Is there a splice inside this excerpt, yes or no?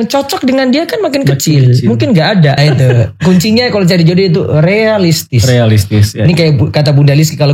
yes